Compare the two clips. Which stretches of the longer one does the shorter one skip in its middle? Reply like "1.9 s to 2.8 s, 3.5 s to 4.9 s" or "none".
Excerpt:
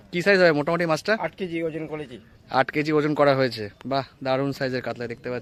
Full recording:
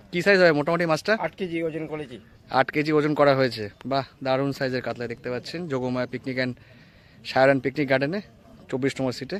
none